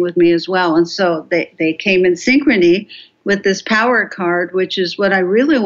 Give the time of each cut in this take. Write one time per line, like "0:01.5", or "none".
none